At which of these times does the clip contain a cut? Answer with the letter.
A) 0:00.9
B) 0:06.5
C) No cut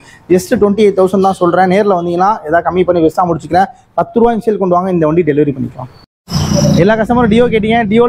B